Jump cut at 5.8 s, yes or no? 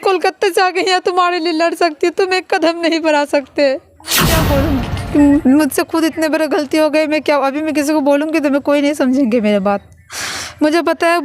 no